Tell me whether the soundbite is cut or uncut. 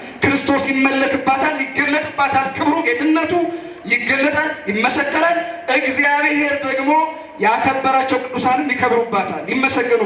uncut